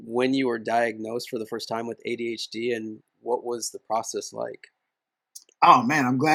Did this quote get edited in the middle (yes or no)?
no